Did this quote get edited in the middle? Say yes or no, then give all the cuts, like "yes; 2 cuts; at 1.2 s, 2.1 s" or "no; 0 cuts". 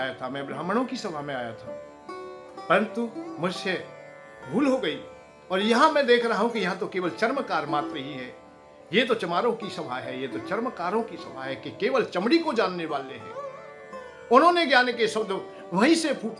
no; 0 cuts